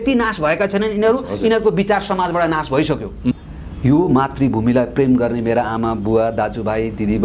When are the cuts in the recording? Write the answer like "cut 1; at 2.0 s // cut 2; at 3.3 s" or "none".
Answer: cut 1; at 3.3 s